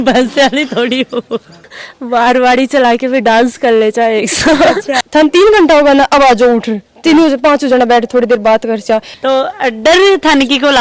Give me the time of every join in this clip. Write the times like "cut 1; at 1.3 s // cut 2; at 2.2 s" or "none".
cut 1; at 1.7 s // cut 2; at 5.0 s // cut 3; at 9.1 s